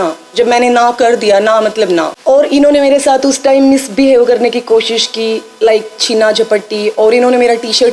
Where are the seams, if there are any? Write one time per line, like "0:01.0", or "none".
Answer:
0:02.1